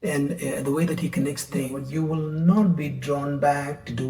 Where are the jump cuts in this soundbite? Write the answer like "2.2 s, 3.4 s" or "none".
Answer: 1.8 s